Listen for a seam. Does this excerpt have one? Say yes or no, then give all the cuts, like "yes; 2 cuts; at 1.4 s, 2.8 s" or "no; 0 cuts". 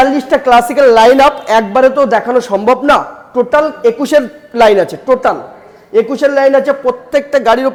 no; 0 cuts